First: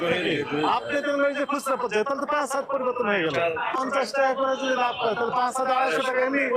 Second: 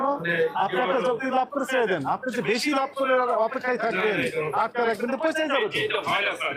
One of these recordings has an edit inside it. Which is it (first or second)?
first